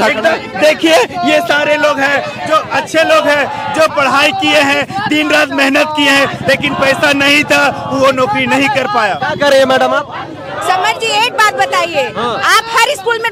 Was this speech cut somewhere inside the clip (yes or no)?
no